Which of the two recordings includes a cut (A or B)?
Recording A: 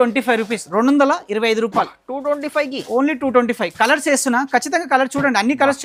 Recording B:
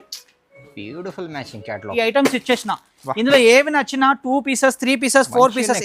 B